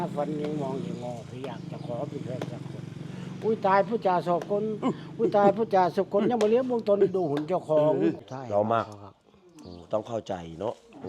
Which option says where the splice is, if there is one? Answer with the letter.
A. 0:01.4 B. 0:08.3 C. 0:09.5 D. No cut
B